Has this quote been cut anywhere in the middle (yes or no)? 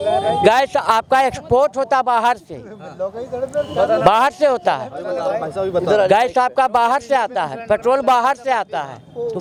no